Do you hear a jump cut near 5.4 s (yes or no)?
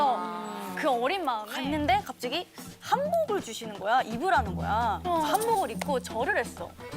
no